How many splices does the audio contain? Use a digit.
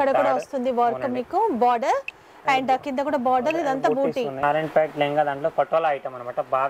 1